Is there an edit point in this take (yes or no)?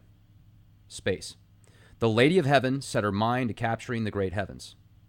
yes